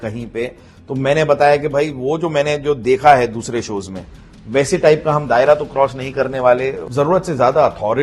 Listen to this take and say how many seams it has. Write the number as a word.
one